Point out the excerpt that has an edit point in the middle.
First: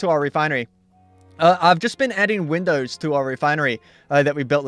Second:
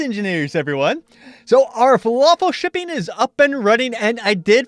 first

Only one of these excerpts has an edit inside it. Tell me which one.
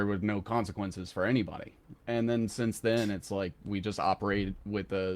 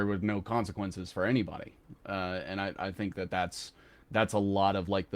first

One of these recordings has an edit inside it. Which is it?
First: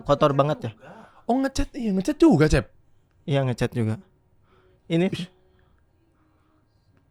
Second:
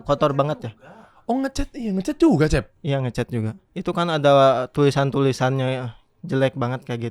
second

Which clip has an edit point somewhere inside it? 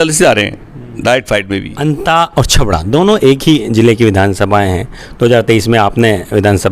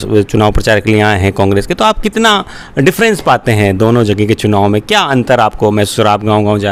first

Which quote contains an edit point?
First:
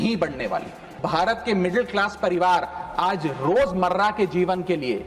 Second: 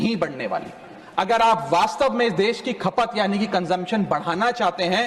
first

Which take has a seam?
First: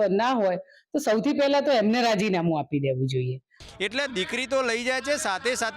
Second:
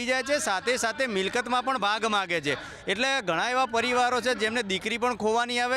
first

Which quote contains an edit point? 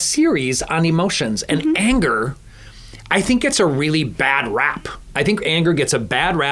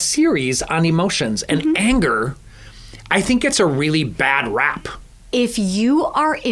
second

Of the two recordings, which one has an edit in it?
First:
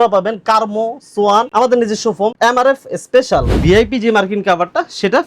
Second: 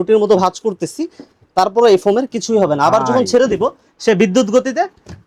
first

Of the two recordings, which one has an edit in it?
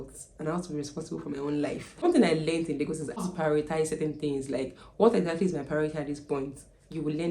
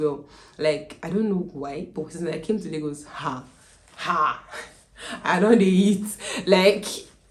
first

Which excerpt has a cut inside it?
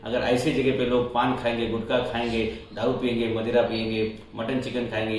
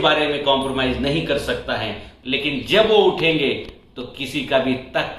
second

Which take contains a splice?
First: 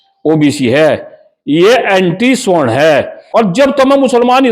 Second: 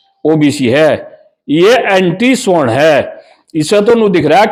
first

